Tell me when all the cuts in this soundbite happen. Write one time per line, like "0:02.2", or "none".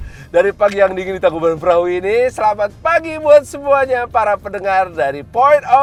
none